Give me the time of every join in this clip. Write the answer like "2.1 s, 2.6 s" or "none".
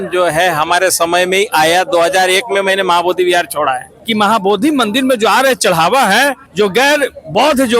3.9 s, 6.4 s